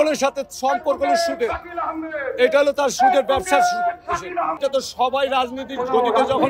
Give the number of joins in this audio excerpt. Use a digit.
1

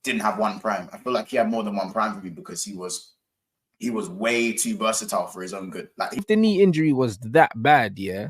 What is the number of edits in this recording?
1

